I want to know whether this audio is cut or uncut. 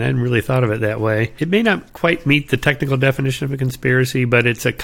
cut